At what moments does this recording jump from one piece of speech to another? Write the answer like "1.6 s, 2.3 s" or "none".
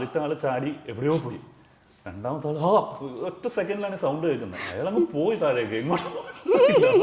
none

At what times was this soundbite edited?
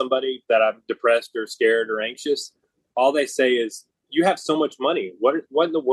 none

